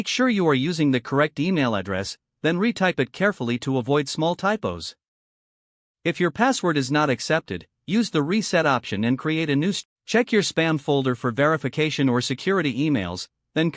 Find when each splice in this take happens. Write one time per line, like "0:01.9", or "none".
0:09.8